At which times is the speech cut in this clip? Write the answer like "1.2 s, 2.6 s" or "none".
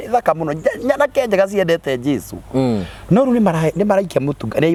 none